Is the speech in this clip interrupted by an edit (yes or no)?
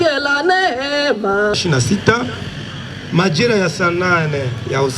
yes